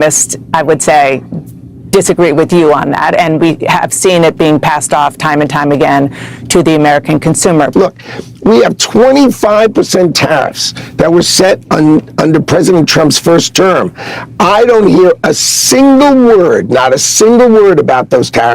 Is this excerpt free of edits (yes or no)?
no